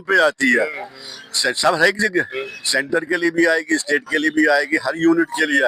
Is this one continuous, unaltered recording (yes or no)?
yes